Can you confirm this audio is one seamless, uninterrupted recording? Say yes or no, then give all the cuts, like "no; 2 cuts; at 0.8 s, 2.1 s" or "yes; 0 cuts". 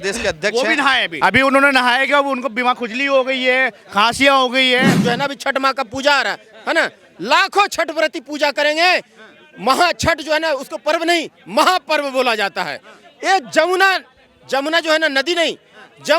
no; 2 cuts; at 1.1 s, 5.0 s